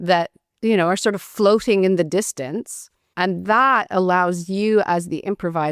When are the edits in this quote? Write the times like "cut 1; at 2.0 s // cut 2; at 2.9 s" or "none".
none